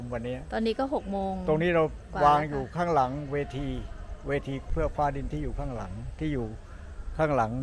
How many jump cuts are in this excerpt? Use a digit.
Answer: 1